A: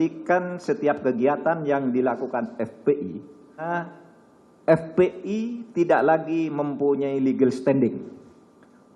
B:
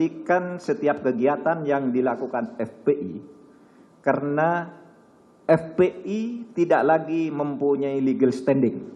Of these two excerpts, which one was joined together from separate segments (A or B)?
A